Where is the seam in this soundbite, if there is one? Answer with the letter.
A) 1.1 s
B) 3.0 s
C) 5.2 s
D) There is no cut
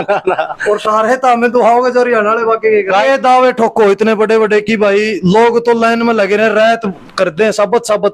B